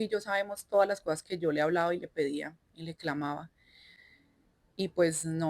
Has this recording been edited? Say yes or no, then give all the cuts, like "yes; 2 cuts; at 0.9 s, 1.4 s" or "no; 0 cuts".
no; 0 cuts